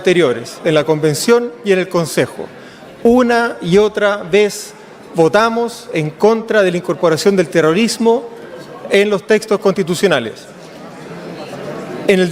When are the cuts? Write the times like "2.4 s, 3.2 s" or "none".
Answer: none